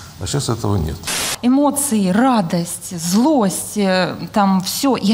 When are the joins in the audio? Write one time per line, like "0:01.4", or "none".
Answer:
0:01.2